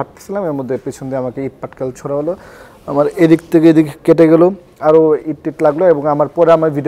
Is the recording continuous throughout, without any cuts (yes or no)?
yes